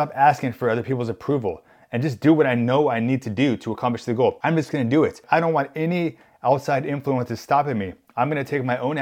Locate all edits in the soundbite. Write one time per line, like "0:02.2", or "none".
0:04.4
0:05.2